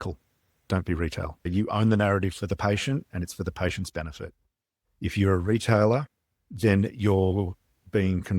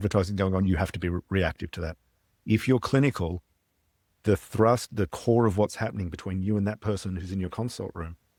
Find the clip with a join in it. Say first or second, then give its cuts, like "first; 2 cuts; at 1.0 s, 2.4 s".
first; 1 cut; at 1.3 s